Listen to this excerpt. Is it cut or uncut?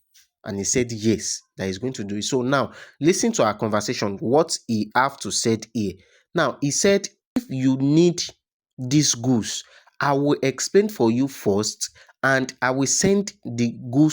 cut